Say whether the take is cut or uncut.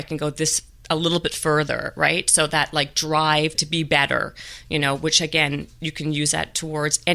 cut